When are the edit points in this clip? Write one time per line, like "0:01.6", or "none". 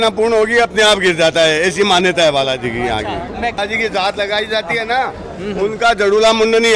0:03.6